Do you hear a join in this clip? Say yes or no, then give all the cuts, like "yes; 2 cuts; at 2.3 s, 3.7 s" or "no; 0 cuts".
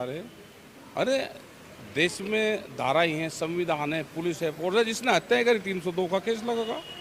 no; 0 cuts